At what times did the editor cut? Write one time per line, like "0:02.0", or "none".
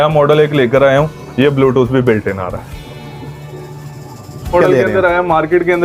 0:04.5